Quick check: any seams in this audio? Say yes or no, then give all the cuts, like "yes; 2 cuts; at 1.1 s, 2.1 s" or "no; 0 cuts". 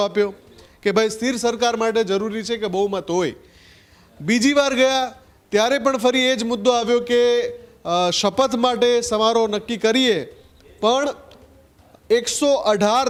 no; 0 cuts